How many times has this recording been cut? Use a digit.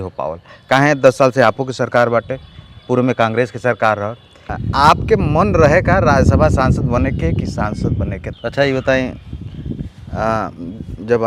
2